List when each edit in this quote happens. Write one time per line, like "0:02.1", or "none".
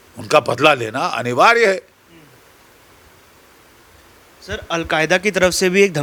none